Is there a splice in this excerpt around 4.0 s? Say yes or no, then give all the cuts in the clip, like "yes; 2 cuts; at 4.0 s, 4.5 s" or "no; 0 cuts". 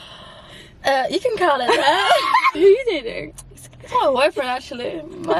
no; 1 cut; at 2.5 s